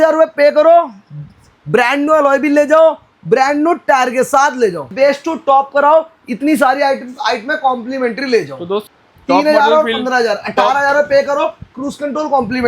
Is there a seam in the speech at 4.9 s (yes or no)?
yes